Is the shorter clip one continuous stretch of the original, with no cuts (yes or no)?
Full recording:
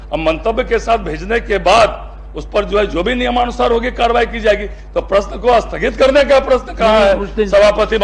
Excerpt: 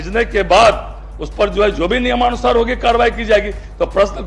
yes